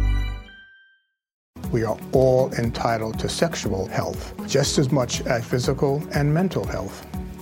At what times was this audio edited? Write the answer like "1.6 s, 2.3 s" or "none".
1.5 s